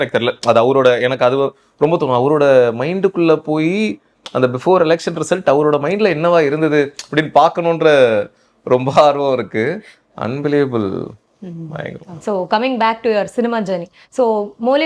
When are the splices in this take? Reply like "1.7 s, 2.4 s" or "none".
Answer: none